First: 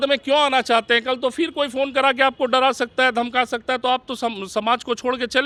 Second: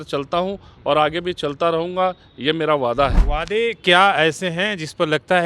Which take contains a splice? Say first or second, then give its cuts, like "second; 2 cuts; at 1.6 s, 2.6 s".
second; 1 cut; at 3.2 s